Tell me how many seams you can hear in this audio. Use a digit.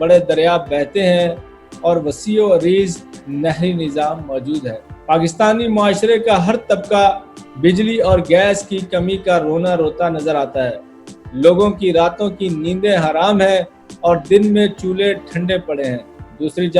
1